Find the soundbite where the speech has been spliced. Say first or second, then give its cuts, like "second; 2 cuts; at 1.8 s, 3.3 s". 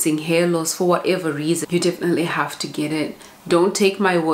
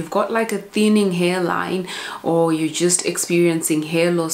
first; 1 cut; at 1.6 s